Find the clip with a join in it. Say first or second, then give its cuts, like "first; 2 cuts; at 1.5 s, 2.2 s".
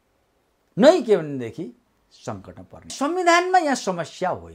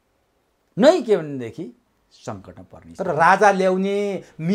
first; 1 cut; at 2.9 s